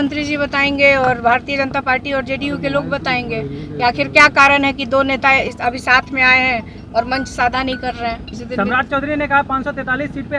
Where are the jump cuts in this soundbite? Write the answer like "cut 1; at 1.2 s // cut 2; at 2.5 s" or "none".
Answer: cut 1; at 8.3 s